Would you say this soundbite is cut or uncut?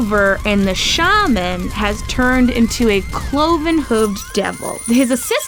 uncut